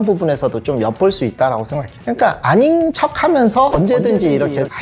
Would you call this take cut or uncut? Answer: uncut